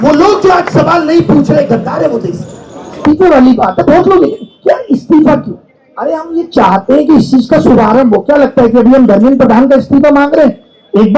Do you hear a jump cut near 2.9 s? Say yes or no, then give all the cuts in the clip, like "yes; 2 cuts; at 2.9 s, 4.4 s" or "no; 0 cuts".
yes; 1 cut; at 2.9 s